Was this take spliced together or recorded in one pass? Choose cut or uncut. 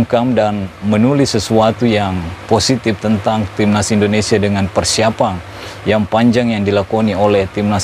uncut